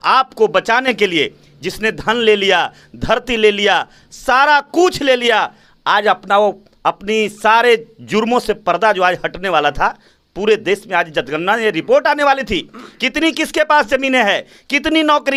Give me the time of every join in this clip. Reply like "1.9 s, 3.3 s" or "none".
none